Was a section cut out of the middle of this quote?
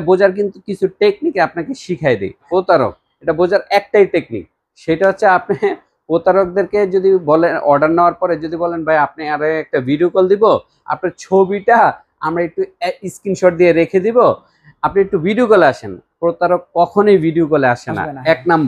yes; 1 cut; at 2.5 s

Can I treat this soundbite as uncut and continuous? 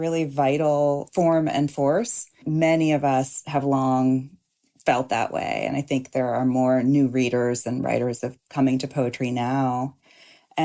no; 2 cuts; at 1.1 s, 2.5 s

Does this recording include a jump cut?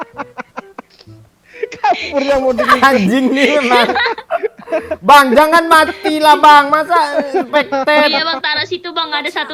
no; 0 cuts

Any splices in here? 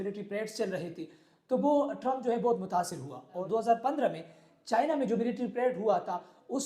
yes; 1 cut; at 3.4 s

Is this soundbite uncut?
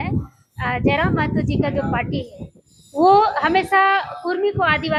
yes; 0 cuts

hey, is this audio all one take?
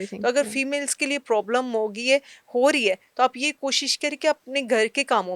yes; 0 cuts

